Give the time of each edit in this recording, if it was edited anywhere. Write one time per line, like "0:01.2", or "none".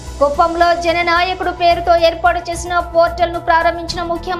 none